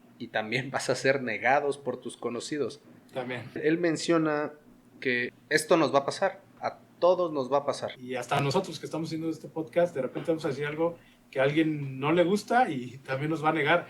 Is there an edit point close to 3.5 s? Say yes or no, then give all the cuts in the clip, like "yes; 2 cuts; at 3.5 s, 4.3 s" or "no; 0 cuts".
yes; 2 cuts; at 3.5 s, 8.0 s